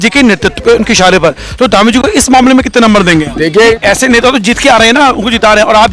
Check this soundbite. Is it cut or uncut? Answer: cut